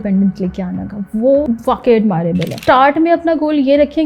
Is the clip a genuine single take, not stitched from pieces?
no; 2 cuts; at 1.4 s, 2.7 s

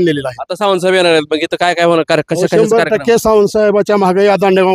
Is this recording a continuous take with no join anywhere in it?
yes; 0 cuts

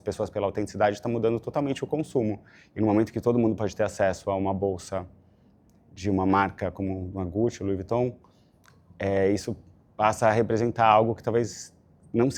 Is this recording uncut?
yes; 0 cuts

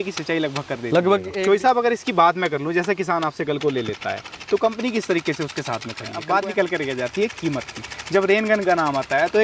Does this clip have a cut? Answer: yes; 2 cuts; at 1.3 s, 6.2 s

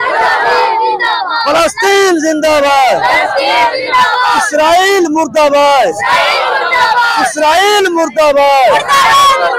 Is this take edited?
no; 0 cuts

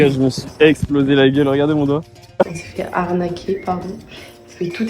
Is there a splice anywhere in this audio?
yes; 1 cut; at 2.4 s

